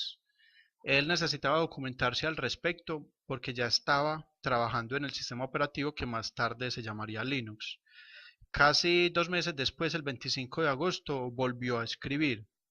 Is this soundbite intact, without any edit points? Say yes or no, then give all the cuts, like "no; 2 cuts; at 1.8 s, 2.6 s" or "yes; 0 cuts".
no; 1 cut; at 9.1 s